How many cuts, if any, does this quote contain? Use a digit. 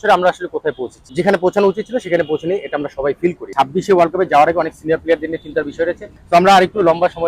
3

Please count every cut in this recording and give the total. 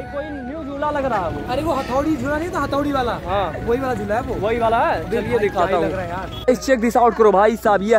1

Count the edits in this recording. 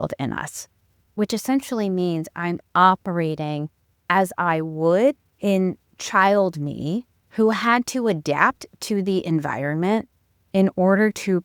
2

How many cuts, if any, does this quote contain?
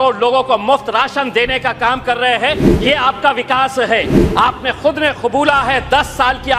1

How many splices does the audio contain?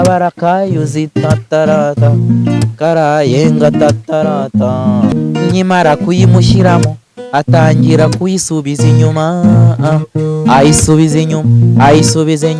1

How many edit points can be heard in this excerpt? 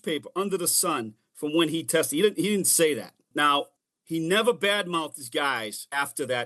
0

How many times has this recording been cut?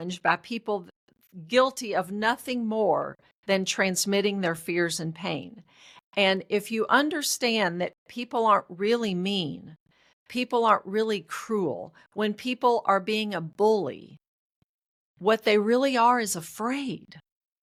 0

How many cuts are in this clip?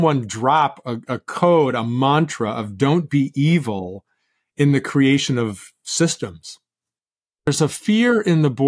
1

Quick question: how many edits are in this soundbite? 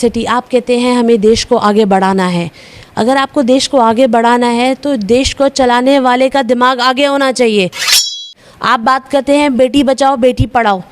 1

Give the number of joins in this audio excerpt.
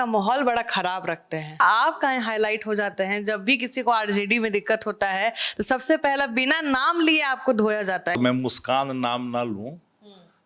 2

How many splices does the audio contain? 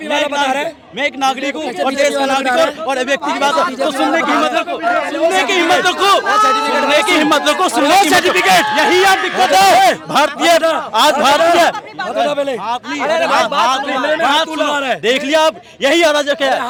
0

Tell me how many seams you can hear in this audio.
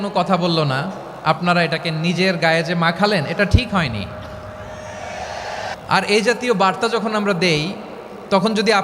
1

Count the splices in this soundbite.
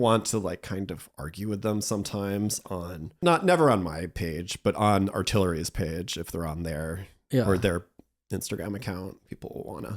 1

